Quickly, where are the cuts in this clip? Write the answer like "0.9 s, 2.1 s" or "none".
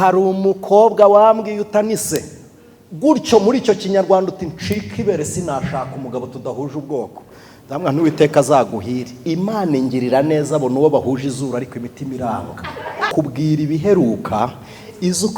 13.0 s